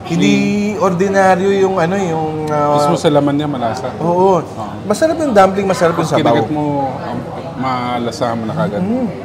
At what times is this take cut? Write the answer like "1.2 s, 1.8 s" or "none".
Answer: none